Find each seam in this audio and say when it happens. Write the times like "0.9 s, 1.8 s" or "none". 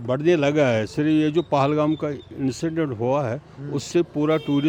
none